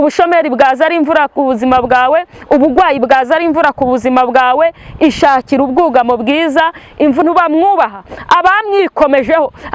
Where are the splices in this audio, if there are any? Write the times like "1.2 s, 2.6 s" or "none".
7.2 s